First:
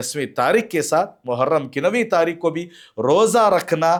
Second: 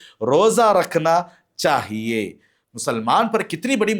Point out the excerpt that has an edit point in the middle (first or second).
second